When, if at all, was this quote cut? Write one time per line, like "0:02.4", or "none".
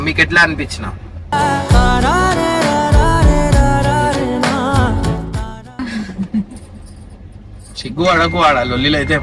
0:05.8

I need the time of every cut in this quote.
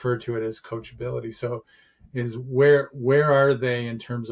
none

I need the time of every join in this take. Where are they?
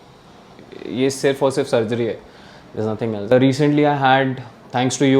0:03.3

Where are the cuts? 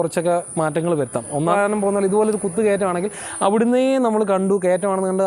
0:01.5

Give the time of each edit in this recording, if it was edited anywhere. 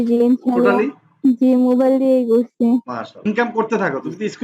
0:03.1

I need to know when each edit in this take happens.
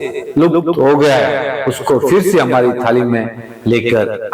none

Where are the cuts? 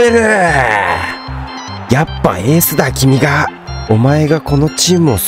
0:03.7

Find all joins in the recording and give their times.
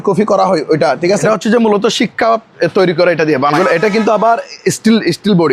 0:01.2
0:03.5

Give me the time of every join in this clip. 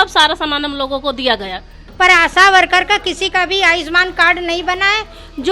0:01.8

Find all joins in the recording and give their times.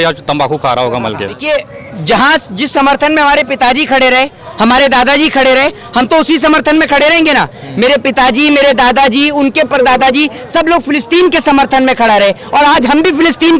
0:01.4

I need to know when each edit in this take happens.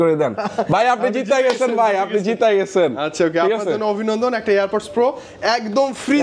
none

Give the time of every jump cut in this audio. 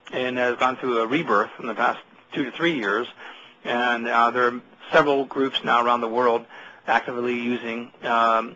0:03.5

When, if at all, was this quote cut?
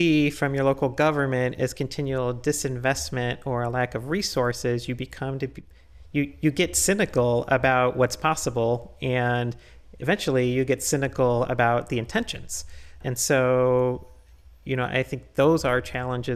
none

